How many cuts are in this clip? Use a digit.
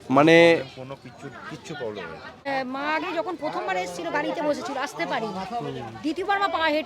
1